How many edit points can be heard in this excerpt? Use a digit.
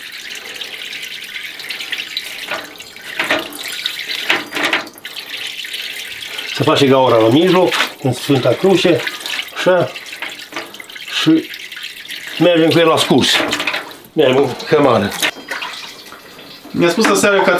1